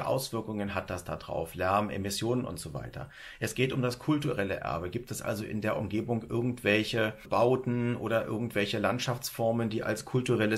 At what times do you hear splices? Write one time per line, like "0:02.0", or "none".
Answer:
0:07.2

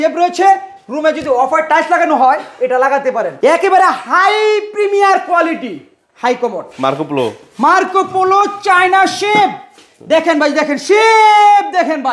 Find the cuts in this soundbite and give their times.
0:03.3

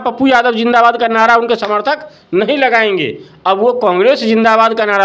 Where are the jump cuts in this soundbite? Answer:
none

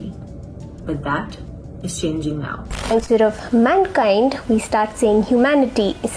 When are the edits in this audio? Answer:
0:02.9

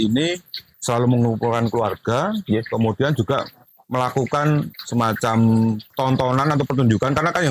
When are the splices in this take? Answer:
0:04.8
0:05.9

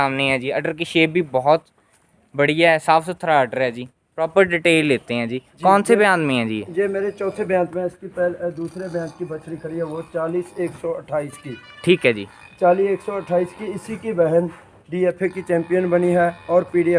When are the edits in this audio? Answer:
none

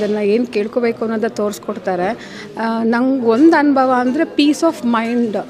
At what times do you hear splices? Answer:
none

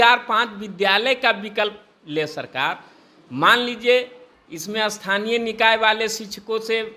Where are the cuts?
none

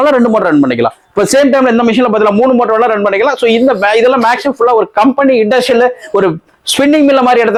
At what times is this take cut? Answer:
none

